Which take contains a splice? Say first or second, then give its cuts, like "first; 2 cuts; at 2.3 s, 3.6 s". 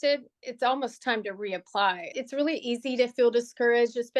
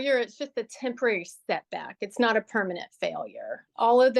first; 1 cut; at 2.1 s